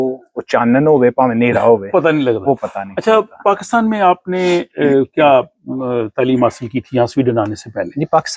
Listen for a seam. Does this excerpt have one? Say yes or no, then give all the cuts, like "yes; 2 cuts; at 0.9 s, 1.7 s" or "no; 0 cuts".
no; 0 cuts